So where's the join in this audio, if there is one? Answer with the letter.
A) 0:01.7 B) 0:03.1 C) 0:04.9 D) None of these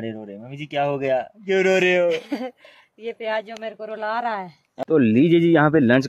C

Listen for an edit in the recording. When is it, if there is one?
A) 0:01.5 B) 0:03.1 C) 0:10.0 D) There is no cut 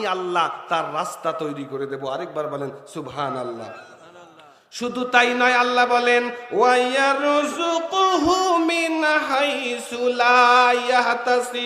D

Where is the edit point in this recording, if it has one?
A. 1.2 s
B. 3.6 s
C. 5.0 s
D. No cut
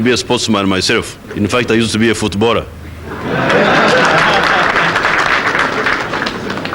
A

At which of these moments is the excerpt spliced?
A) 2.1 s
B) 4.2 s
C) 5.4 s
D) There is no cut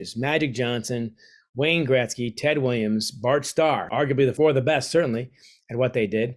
B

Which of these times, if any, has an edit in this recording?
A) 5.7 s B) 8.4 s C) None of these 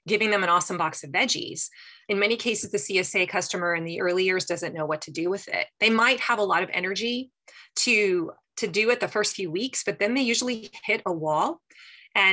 B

